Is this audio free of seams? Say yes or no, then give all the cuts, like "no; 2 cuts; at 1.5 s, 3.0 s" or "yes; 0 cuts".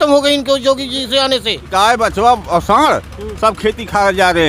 no; 1 cut; at 1.7 s